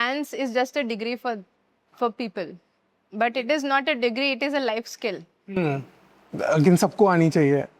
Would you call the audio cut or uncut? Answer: uncut